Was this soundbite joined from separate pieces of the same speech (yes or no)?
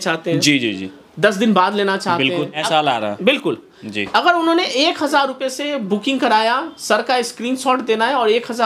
yes